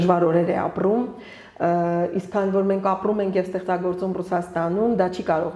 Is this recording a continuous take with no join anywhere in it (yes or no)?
yes